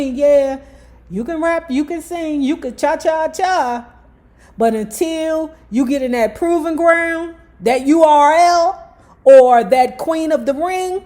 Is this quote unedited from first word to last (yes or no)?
yes